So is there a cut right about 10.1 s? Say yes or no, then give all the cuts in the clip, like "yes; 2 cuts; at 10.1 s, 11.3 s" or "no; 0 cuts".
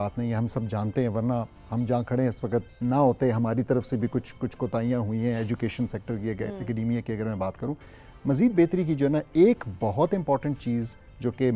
no; 0 cuts